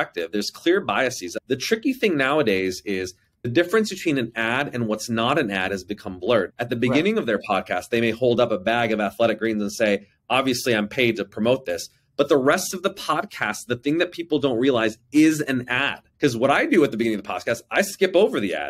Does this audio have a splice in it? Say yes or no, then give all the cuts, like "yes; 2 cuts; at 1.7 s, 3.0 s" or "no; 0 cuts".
no; 0 cuts